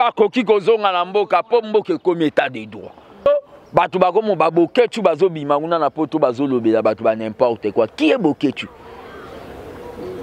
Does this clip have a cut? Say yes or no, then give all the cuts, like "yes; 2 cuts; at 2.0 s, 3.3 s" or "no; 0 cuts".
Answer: yes; 1 cut; at 3.3 s